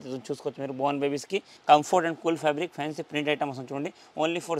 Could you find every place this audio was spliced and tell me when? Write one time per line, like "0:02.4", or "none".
0:01.5